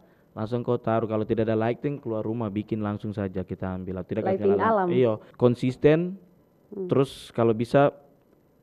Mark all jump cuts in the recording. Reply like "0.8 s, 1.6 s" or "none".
5.3 s